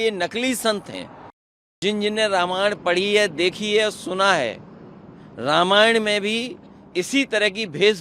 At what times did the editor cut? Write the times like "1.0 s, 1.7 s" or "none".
1.8 s